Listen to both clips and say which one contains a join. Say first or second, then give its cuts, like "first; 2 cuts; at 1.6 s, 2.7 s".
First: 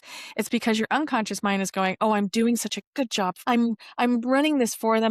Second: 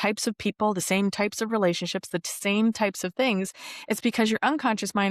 first; 1 cut; at 3.4 s